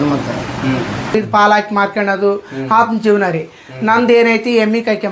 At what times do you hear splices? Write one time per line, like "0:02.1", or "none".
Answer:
0:01.1